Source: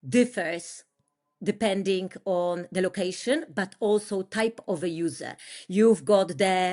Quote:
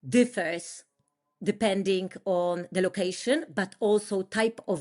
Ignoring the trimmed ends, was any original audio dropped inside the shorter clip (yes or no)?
no